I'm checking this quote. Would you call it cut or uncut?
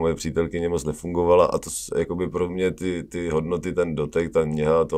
uncut